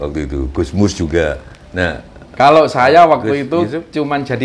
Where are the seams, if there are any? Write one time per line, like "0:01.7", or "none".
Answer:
none